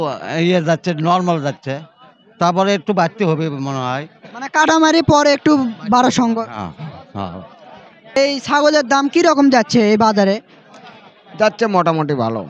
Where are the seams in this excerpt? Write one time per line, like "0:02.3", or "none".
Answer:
0:08.2